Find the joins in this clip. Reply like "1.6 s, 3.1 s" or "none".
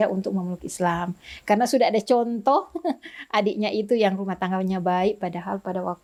none